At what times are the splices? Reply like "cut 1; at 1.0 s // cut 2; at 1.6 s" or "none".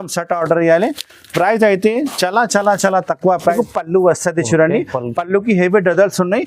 cut 1; at 3.5 s